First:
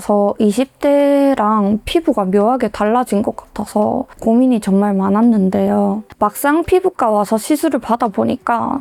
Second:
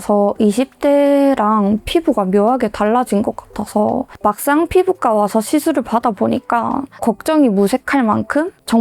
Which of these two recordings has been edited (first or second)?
second